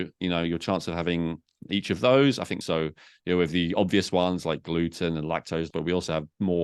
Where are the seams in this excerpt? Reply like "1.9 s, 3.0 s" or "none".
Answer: 1.6 s, 2.6 s, 5.7 s